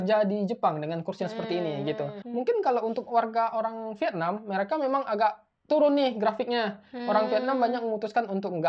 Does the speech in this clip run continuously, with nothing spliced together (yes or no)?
no